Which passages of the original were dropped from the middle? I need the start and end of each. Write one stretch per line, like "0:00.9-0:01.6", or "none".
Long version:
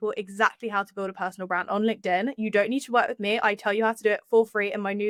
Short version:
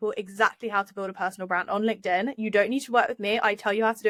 none